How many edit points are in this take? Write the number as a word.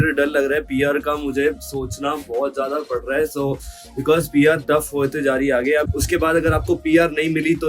one